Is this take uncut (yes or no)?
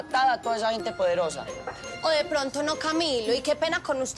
no